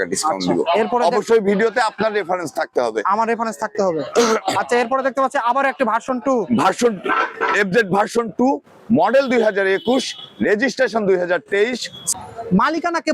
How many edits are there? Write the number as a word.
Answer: one